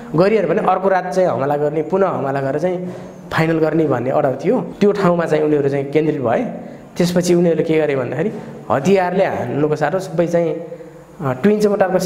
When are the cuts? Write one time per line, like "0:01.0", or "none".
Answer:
0:04.7